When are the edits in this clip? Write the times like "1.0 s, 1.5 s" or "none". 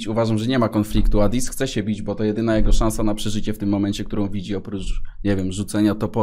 none